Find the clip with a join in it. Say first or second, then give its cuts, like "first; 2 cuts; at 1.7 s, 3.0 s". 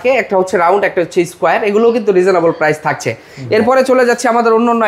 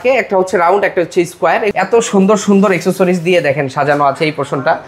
second; 1 cut; at 1.7 s